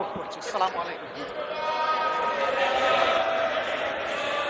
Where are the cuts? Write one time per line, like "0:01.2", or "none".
none